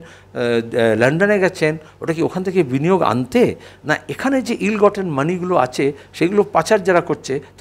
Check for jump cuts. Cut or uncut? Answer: uncut